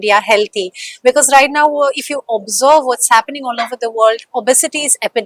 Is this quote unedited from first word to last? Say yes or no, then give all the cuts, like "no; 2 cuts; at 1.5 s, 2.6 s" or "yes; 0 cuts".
yes; 0 cuts